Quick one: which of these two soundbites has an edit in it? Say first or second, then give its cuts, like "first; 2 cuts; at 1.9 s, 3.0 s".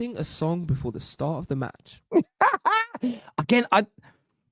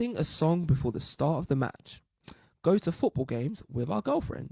second; 1 cut; at 1.9 s